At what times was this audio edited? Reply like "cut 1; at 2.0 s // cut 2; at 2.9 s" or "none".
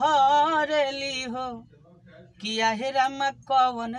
none